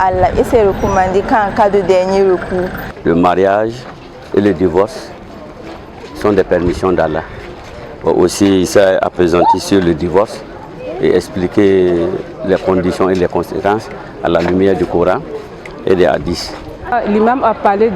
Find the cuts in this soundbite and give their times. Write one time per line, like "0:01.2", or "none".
0:02.9
0:16.9